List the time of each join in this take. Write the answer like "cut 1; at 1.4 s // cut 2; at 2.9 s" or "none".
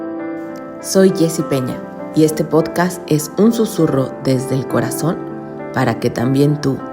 cut 1; at 0.9 s